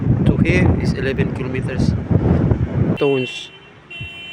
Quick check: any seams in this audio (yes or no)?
yes